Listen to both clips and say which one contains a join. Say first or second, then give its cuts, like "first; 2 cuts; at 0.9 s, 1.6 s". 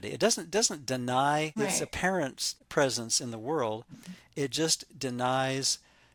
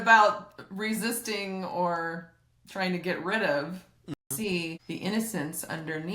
second; 1 cut; at 4.1 s